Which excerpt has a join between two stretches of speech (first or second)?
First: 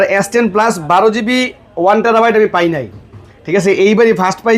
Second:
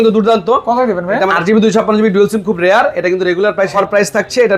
second